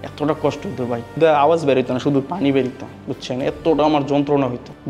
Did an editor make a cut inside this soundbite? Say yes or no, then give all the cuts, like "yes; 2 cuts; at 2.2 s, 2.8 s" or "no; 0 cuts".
yes; 1 cut; at 1.1 s